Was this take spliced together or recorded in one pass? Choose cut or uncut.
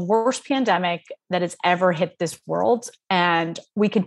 uncut